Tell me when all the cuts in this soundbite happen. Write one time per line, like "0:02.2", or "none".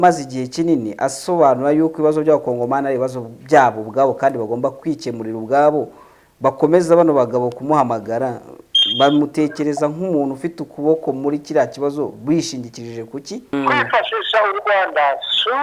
0:04.8
0:13.5